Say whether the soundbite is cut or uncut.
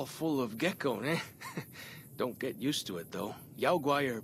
uncut